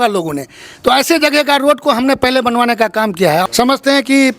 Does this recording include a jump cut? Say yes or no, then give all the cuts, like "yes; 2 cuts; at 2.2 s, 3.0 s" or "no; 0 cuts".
yes; 1 cut; at 3.4 s